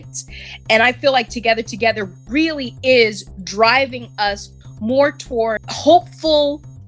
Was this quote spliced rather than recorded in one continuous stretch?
yes; 1 cut; at 5.7 s

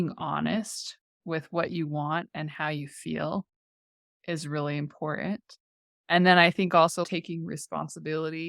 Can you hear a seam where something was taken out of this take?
yes; 1 cut; at 7.0 s

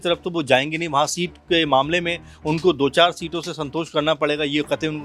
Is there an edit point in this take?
no; 0 cuts

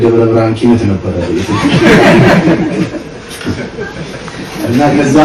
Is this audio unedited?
yes; 0 cuts

